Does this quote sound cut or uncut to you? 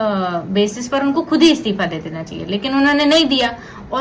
uncut